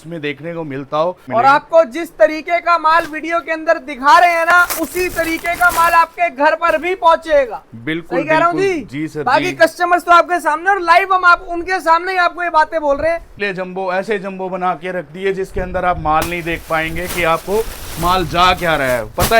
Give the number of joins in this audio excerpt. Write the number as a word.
two